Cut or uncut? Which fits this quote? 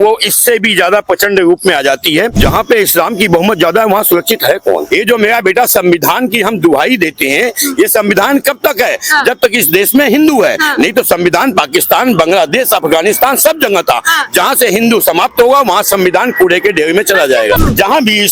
cut